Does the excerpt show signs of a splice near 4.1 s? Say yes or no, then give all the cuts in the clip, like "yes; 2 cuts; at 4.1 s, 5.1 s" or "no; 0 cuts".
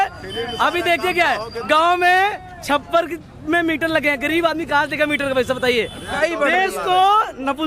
no; 1 cut; at 6.1 s